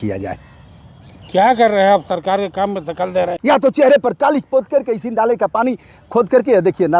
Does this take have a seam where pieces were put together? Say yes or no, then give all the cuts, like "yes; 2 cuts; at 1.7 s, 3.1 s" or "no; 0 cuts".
yes; 1 cut; at 3.4 s